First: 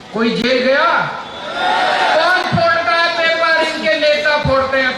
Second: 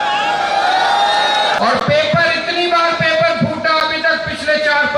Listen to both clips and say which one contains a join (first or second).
second